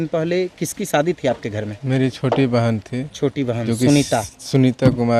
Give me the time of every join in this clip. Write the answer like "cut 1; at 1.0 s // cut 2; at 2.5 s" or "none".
none